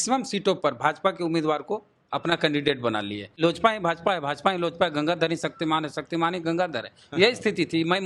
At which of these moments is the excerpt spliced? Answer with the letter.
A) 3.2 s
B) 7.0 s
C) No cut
A